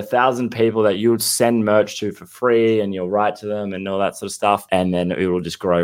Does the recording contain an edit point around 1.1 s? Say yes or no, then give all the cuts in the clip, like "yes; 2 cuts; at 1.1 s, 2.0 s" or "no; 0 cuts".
no; 1 cut; at 4.6 s